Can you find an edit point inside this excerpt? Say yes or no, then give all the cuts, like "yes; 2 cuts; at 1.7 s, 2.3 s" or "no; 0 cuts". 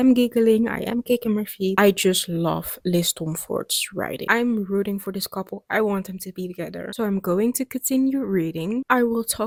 no; 0 cuts